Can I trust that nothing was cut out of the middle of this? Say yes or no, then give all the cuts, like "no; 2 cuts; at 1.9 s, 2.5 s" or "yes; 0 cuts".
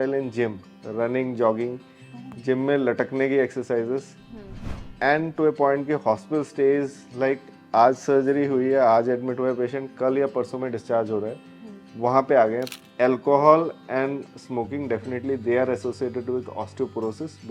no; 1 cut; at 12.8 s